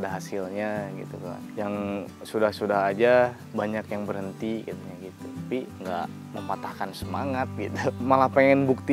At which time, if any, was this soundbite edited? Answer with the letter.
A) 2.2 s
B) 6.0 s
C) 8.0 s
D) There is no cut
C